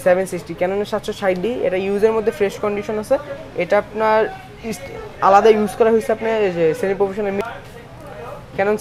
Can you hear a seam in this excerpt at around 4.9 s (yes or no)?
no